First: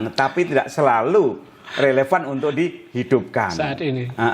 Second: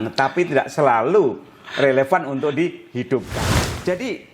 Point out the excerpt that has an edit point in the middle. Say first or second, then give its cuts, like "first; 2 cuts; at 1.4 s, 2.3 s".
second; 1 cut; at 3.4 s